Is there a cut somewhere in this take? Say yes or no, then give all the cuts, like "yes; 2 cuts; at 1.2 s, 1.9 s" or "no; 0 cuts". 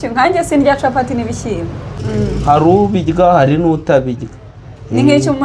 yes; 1 cut; at 2.0 s